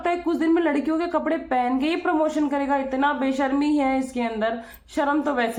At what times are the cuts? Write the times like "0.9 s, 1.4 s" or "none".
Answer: none